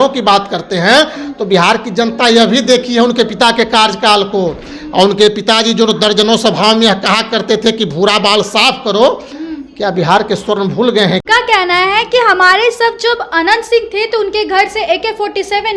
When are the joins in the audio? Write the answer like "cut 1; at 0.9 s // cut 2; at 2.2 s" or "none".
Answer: cut 1; at 11.2 s